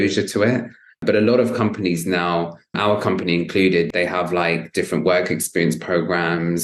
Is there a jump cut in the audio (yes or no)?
no